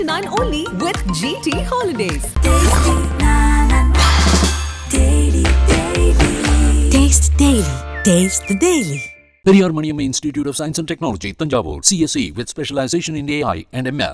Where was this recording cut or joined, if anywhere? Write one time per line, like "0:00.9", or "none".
none